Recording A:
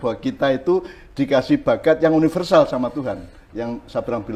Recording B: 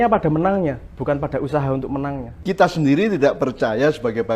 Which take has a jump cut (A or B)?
B